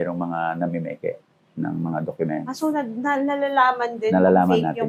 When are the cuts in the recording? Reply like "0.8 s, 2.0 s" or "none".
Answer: none